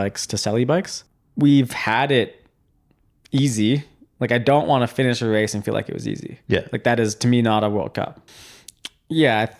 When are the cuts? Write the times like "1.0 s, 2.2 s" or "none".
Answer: 1.0 s, 8.2 s